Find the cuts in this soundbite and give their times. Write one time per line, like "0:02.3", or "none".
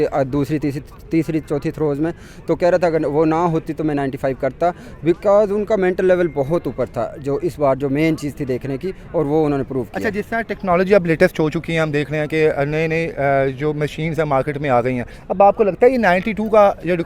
none